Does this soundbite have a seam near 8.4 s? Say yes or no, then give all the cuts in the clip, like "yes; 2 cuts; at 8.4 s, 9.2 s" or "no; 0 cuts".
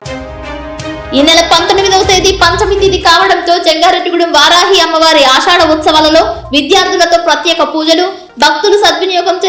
no; 1 cut; at 1.1 s